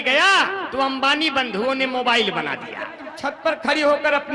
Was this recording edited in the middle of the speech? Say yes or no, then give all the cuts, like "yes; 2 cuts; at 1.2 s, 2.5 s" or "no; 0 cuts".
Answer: yes; 1 cut; at 3.1 s